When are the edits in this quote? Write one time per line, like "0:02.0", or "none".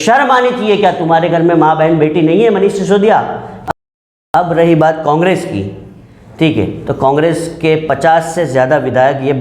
0:03.7

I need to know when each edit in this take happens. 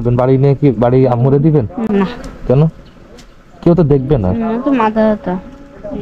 0:01.8

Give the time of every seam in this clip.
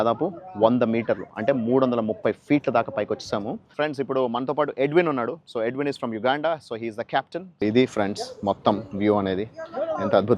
0:03.6
0:07.4

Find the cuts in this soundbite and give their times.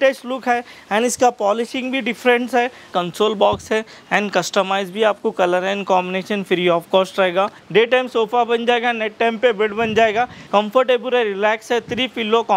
0:02.9
0:07.6
0:10.4

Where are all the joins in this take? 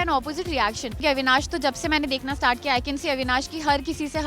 0:01.0

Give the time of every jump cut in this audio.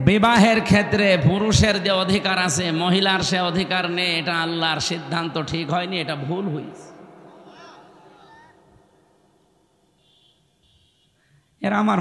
none

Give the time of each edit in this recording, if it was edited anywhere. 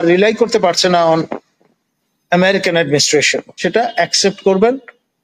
0:03.6

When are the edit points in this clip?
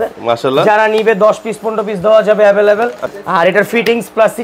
0:03.1

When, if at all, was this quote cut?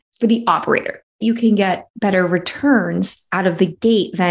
0:01.0
0:01.9

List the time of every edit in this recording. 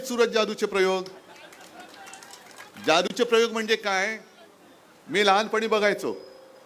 none

